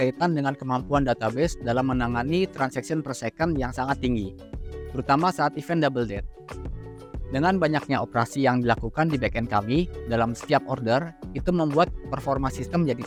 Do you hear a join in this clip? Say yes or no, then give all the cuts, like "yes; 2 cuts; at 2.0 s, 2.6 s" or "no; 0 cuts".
no; 0 cuts